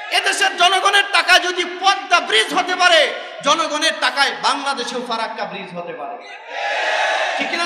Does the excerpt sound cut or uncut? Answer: uncut